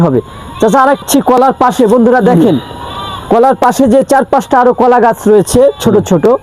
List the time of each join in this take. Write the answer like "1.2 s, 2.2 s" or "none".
1.0 s